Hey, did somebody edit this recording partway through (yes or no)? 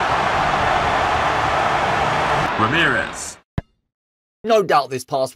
yes